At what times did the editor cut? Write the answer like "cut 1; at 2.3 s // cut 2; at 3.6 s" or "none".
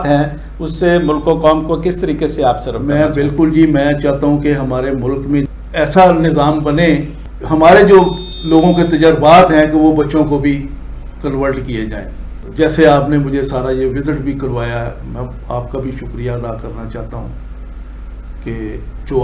none